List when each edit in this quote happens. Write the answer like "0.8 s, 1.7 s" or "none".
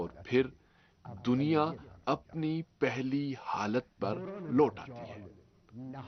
none